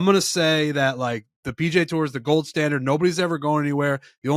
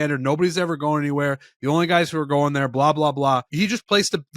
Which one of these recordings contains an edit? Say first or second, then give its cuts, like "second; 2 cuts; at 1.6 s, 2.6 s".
second; 1 cut; at 3.5 s